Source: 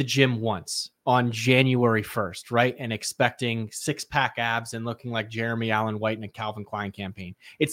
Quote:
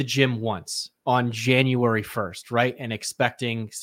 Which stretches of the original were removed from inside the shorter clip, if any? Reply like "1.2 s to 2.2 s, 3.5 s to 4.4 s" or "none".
none